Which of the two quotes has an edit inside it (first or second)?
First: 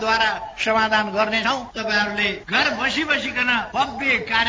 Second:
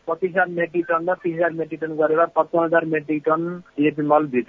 first